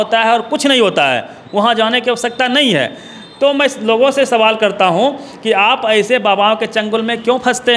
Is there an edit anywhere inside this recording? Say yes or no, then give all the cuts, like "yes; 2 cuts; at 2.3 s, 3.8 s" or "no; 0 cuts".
no; 0 cuts